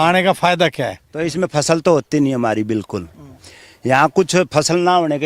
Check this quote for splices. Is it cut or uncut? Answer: uncut